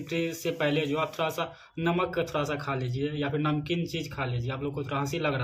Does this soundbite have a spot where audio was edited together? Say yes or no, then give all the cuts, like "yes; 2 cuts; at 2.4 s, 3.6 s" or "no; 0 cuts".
no; 0 cuts